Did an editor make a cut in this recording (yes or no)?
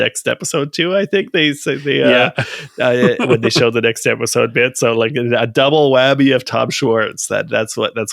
no